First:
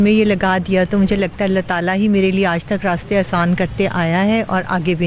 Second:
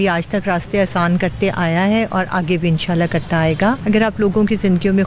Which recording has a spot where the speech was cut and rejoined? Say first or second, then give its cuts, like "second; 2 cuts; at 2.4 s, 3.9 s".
second; 1 cut; at 3.8 s